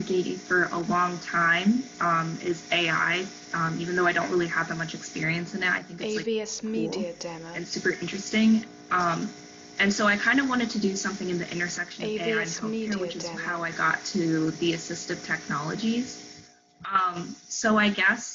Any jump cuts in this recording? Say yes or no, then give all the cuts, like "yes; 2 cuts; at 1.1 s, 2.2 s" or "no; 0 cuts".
yes; 2 cuts; at 5.9 s, 7.5 s